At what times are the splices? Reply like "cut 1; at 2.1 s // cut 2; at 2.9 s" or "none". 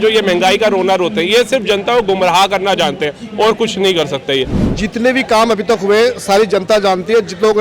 cut 1; at 4.6 s